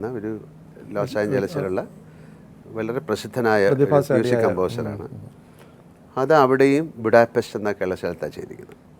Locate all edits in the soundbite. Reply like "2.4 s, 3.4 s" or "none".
none